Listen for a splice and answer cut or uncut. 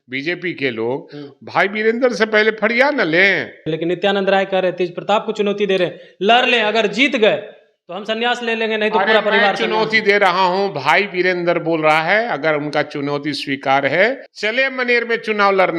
cut